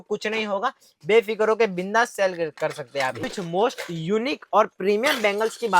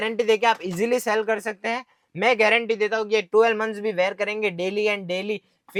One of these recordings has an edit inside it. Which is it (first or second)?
first